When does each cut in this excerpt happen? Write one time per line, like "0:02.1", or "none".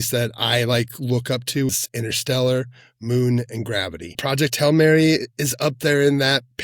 0:01.7
0:04.2